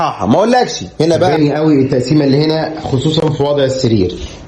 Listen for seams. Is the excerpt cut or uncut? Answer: cut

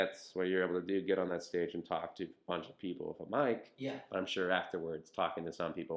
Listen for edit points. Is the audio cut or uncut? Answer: uncut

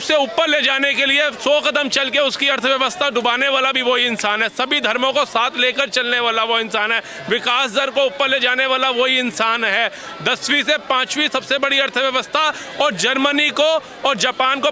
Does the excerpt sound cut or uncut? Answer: uncut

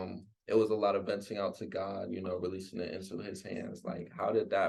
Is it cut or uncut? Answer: uncut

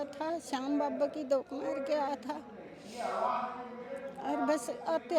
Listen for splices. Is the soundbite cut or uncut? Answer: uncut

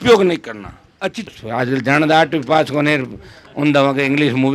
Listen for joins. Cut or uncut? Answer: cut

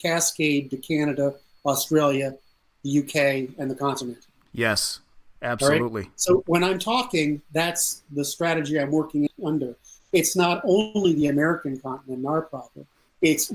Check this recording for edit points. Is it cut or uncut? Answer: uncut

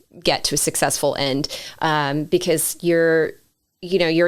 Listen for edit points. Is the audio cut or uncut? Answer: uncut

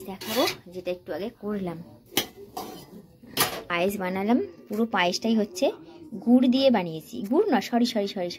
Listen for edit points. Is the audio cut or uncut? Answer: cut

